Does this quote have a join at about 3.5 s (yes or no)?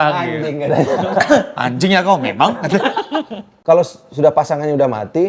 yes